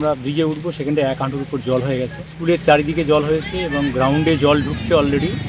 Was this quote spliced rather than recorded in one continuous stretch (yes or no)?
yes